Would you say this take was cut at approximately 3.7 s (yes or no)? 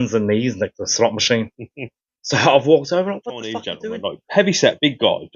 yes